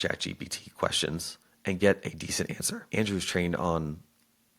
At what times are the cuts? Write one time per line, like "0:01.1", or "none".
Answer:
0:02.9